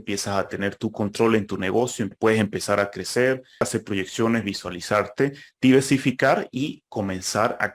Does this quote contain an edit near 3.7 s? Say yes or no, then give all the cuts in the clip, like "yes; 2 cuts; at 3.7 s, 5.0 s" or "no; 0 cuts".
yes; 2 cuts; at 2.1 s, 3.7 s